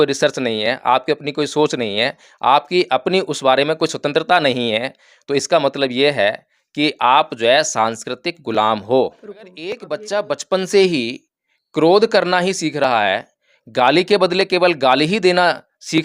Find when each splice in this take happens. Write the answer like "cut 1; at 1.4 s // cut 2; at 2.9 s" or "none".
cut 1; at 9.2 s